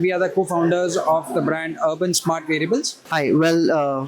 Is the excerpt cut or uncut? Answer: cut